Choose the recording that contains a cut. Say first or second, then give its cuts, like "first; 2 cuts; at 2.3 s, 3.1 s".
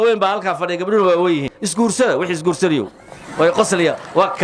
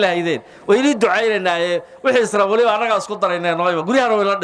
first; 1 cut; at 1.6 s